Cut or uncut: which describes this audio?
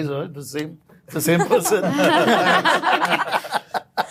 uncut